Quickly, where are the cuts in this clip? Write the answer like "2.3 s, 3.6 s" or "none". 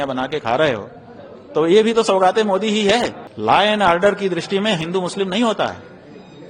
3.2 s

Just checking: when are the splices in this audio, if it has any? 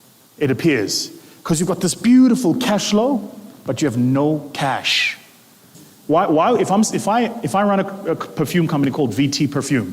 5.7 s

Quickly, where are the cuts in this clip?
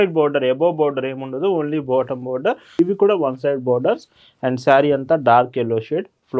2.8 s

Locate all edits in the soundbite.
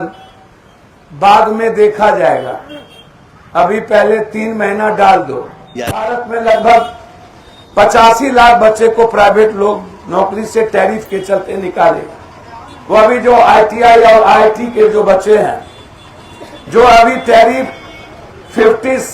6.1 s

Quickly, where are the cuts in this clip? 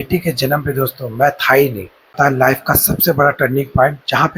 2.1 s

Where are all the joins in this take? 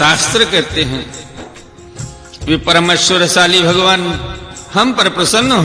1.2 s, 2.5 s

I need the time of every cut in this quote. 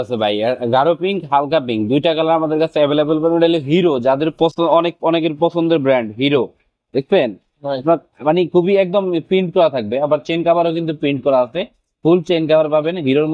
none

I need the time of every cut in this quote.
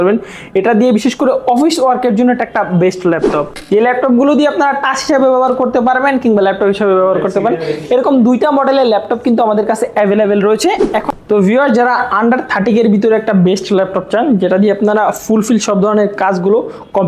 3.5 s, 11.1 s

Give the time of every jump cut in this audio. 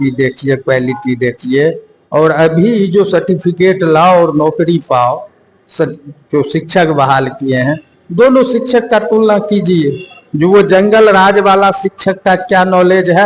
none

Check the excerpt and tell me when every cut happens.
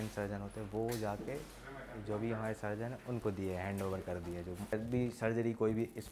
4.7 s

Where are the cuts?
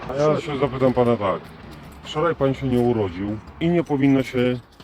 3.5 s

